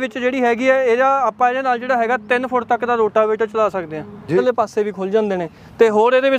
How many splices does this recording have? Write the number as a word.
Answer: one